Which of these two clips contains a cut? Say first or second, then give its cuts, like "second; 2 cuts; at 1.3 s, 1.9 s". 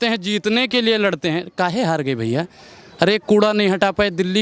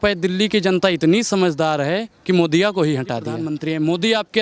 second; 1 cut; at 3.5 s